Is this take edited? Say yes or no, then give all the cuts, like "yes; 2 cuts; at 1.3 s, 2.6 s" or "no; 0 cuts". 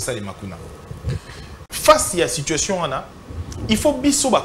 yes; 1 cut; at 1.7 s